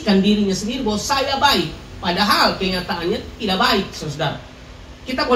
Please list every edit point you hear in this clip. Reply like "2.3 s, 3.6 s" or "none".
none